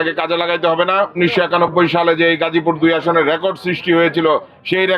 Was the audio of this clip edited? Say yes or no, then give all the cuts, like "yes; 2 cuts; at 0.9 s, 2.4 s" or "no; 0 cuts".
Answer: yes; 1 cut; at 1.2 s